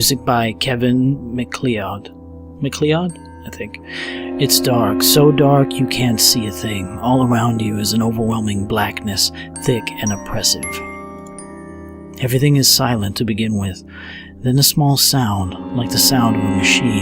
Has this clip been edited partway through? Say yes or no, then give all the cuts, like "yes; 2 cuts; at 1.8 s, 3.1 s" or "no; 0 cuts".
yes; 1 cut; at 12.0 s